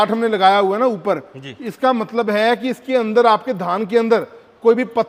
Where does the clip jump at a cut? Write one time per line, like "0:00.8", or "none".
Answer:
none